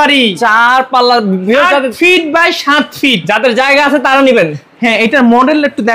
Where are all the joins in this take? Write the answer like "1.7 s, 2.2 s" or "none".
none